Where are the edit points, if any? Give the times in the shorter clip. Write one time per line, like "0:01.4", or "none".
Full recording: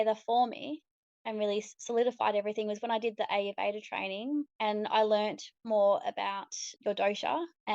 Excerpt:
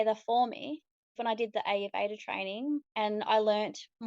0:01.2